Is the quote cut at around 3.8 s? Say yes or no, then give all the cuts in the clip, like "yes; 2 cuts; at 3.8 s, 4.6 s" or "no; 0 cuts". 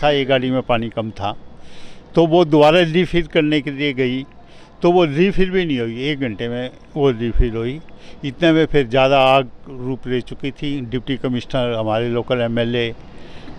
no; 0 cuts